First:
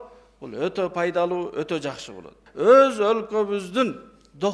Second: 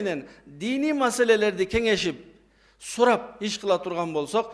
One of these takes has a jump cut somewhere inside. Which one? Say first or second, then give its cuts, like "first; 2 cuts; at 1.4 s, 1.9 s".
first; 1 cut; at 2.4 s